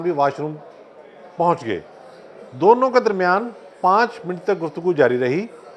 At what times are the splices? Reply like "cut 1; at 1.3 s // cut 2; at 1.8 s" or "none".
none